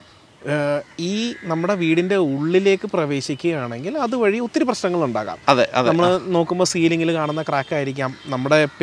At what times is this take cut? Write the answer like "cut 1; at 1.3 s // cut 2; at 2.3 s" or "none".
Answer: none